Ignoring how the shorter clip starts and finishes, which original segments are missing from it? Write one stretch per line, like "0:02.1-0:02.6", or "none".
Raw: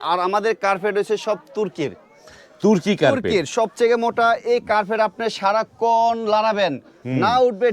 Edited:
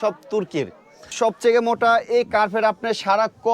0:02.4-0:03.5